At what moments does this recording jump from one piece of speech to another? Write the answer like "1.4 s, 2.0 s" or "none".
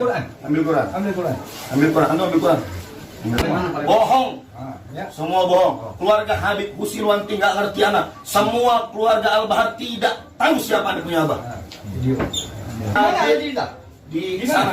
3.4 s, 13.0 s